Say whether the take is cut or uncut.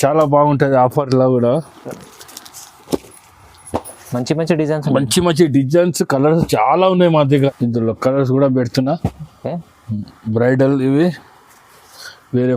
cut